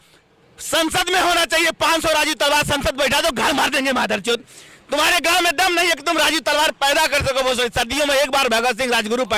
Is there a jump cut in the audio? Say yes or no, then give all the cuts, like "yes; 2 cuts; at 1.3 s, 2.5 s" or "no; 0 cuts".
no; 0 cuts